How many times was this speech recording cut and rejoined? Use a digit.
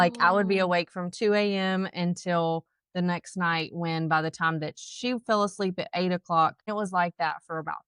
1